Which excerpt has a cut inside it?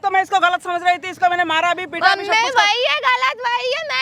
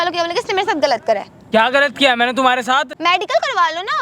second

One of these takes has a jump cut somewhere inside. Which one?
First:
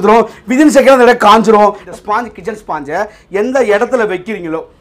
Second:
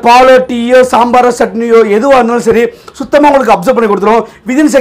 first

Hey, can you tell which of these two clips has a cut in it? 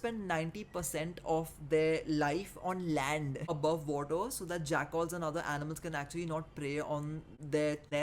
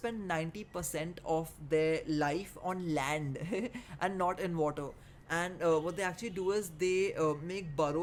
first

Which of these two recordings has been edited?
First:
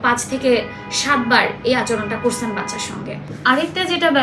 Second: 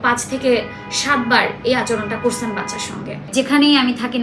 second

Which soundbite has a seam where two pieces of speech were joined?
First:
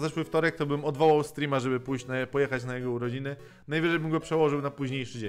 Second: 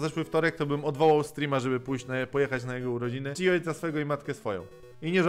second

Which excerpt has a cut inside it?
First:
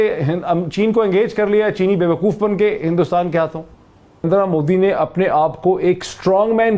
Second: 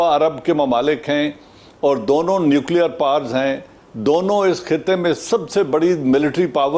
first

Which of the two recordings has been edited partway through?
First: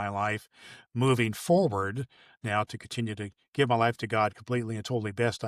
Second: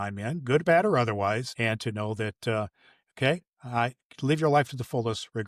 second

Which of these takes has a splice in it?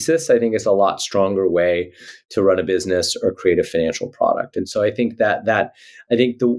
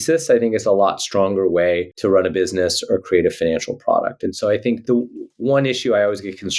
second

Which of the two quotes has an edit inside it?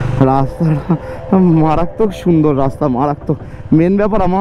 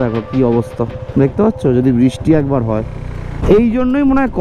second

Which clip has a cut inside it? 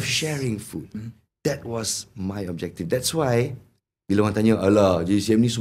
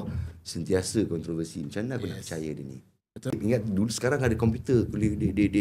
second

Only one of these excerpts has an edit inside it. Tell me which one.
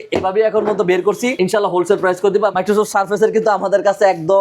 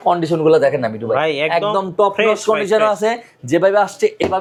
first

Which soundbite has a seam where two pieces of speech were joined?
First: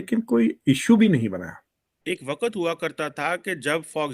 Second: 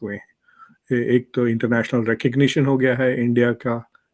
first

